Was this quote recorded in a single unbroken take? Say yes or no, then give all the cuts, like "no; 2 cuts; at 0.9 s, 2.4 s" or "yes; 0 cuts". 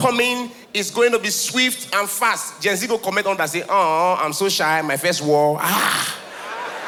yes; 0 cuts